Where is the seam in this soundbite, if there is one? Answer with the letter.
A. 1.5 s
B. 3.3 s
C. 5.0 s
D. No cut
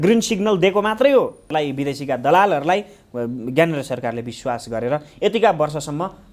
A